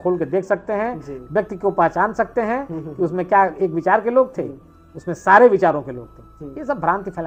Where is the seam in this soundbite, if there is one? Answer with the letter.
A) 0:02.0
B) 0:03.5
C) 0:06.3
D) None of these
D